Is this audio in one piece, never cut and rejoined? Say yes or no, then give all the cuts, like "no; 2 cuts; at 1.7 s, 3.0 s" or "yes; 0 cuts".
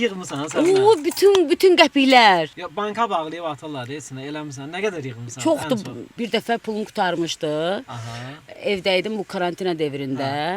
yes; 0 cuts